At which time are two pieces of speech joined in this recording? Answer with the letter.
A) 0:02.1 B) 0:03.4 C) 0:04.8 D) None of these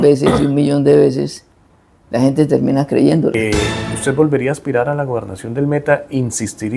B